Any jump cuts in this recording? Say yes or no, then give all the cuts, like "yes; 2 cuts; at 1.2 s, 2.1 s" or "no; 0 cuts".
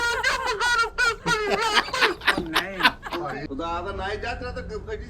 yes; 1 cut; at 3.4 s